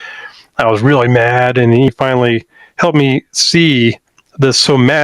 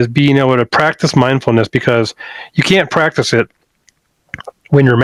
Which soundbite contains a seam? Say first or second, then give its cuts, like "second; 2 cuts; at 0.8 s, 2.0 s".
first; 1 cut; at 1.9 s